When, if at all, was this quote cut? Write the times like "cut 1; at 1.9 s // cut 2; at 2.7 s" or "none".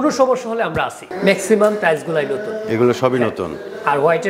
cut 1; at 1.0 s